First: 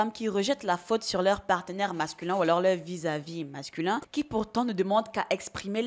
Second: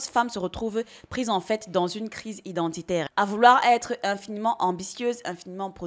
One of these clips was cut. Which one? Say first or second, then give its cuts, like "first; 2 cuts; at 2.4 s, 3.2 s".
second; 1 cut; at 3.1 s